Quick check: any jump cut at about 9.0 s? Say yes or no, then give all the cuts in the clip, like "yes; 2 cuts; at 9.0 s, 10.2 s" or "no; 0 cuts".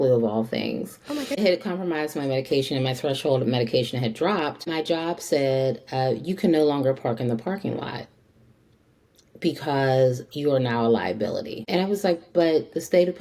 no; 3 cuts; at 1.4 s, 4.7 s, 11.6 s